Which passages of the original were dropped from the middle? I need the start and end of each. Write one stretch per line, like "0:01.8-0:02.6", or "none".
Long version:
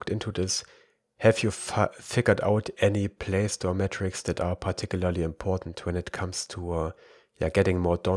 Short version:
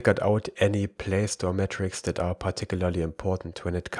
none